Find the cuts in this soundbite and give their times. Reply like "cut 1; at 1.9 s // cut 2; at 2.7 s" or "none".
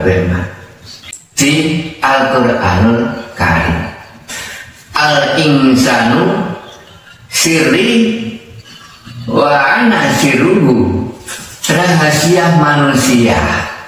cut 1; at 1.4 s